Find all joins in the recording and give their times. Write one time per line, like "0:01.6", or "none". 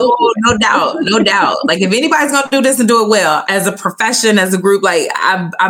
0:03.4